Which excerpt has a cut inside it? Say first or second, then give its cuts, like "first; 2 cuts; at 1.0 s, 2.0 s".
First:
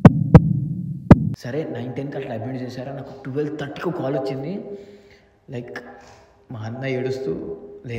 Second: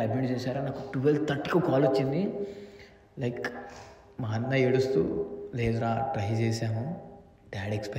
first; 1 cut; at 1.3 s